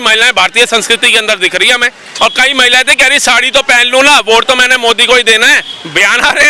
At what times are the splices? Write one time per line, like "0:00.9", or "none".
0:02.0